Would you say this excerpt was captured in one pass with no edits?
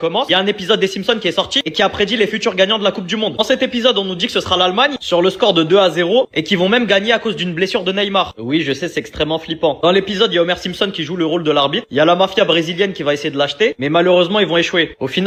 yes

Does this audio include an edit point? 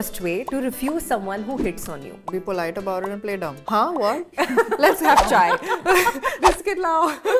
yes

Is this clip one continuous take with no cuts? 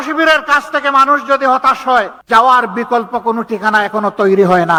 yes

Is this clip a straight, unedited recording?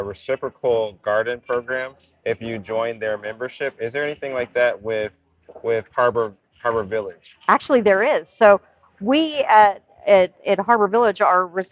yes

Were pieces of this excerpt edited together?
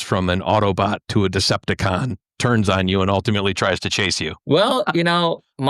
yes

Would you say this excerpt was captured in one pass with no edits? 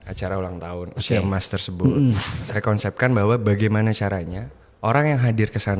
no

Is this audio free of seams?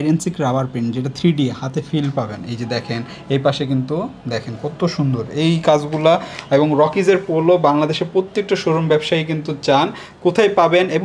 yes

